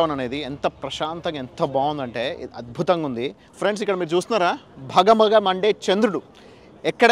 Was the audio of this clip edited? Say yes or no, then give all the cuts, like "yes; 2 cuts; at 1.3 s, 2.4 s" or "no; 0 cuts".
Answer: yes; 1 cut; at 3.4 s